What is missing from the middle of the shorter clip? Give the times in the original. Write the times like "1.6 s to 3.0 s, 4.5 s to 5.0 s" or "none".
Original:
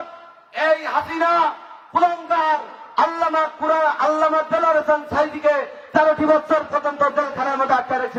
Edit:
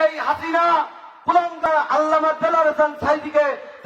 2.3 s to 3.8 s